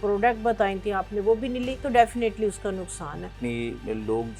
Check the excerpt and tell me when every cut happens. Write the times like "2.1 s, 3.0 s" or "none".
1.8 s, 3.4 s